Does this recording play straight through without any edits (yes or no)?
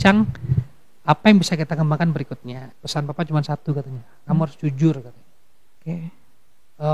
no